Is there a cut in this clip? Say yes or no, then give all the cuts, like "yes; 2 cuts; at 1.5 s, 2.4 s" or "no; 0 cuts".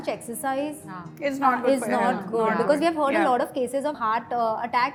no; 0 cuts